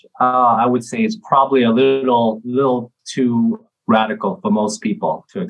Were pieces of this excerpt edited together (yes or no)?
yes